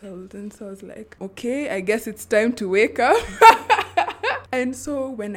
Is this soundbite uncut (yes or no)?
no